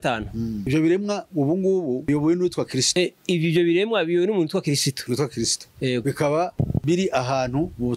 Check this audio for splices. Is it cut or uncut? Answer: uncut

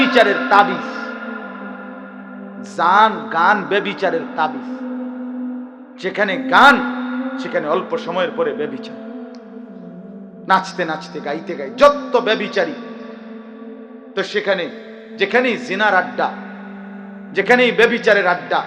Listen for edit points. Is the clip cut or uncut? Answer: cut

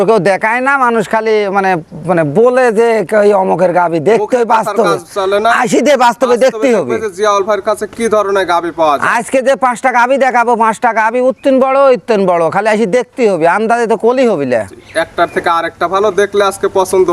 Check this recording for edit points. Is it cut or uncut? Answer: uncut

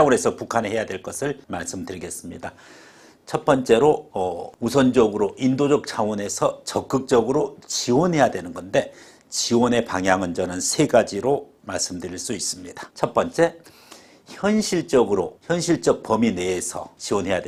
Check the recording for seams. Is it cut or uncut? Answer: uncut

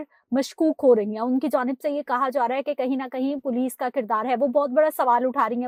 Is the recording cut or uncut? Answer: uncut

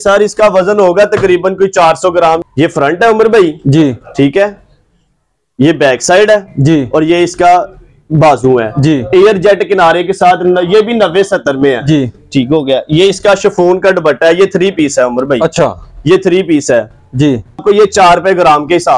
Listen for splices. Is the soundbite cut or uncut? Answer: cut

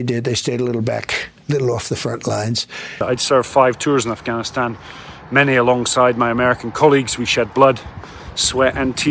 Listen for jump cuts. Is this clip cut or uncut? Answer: cut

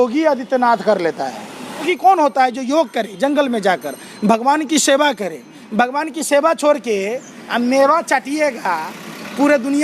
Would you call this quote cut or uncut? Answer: cut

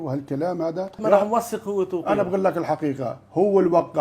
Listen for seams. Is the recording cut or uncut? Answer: cut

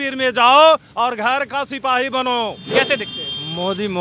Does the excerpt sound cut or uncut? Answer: cut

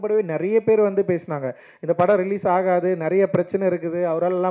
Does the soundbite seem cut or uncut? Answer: uncut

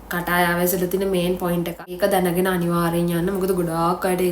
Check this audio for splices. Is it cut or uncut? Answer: cut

